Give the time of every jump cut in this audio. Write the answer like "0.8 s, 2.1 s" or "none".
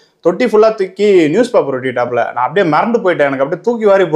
none